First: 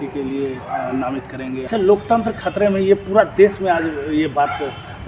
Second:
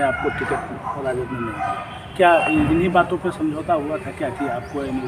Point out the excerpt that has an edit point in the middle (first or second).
first